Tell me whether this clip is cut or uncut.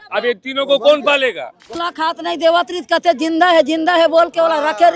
cut